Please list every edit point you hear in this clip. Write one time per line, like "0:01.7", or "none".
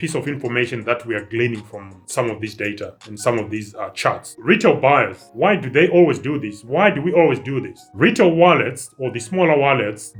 none